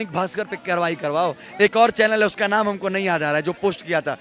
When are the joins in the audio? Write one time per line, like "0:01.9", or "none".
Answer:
none